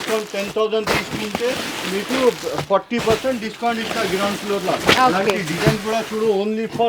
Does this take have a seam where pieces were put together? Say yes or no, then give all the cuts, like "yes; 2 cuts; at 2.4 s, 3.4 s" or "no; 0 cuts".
no; 0 cuts